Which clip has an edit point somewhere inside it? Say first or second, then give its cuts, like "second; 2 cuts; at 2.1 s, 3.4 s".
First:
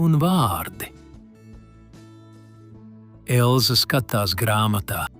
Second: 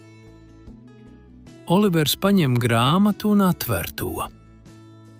first; 2 cuts; at 0.9 s, 2.7 s